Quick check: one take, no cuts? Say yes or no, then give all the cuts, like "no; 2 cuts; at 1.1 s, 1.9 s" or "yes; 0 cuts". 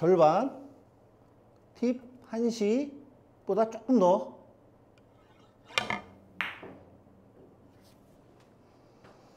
yes; 0 cuts